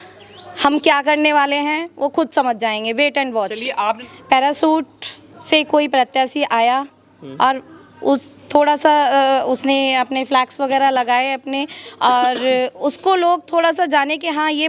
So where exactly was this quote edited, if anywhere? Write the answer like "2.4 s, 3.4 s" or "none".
4.0 s